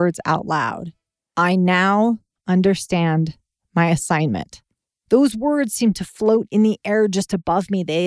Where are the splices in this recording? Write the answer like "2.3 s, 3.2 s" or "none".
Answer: none